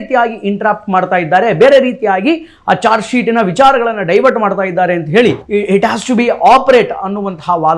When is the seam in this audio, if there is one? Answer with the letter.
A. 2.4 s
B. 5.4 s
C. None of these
B